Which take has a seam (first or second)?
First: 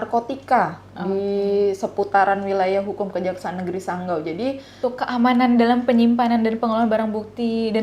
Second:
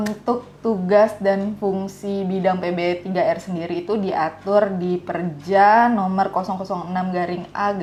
first